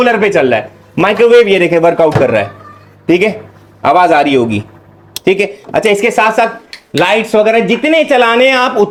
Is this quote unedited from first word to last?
yes; 0 cuts

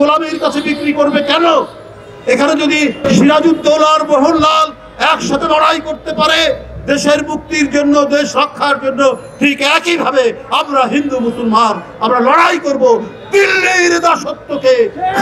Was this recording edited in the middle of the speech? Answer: no; 0 cuts

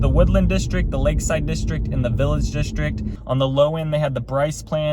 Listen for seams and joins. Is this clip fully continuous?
no; 1 cut; at 3.1 s

